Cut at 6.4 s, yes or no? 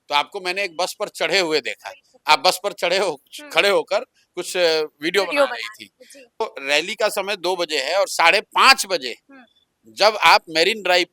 yes